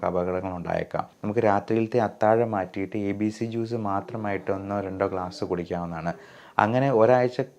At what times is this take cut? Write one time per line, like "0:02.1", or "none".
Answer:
0:01.1